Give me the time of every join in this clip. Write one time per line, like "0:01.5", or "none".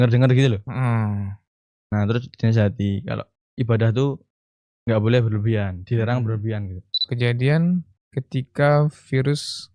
0:07.1